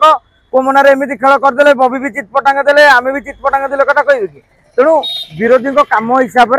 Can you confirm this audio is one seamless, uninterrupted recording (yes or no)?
yes